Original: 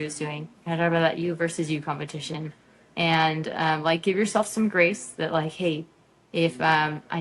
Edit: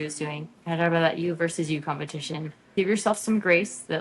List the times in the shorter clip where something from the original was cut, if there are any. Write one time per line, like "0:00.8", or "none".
0:02.7

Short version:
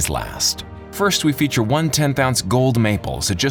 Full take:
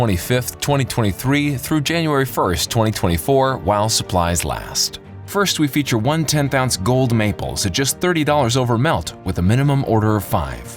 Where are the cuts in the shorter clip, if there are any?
none

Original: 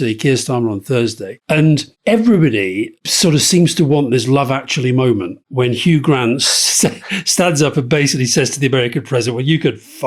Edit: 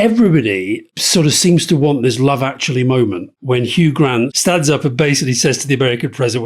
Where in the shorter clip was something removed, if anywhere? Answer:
0:04.4

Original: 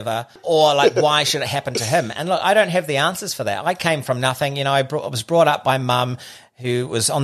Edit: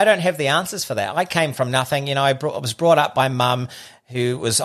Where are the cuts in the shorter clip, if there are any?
none

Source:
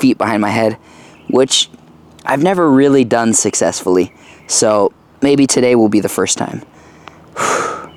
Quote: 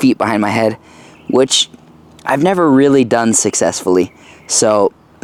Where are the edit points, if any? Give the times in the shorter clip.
none

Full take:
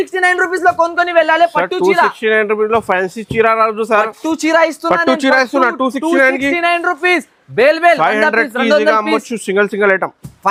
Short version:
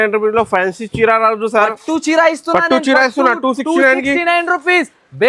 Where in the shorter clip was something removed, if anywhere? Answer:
none

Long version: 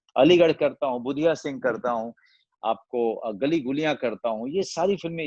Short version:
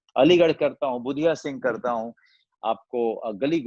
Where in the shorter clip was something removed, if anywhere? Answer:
none

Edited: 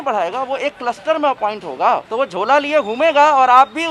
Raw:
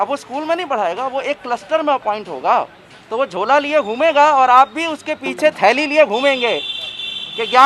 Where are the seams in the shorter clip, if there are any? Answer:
0:02.1

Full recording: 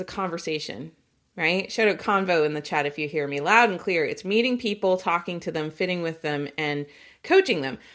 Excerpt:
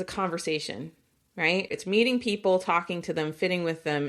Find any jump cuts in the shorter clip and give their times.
0:01.7

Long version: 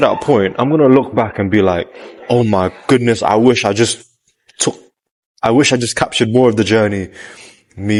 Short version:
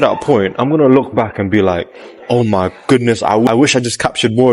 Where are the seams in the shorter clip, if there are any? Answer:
0:03.5

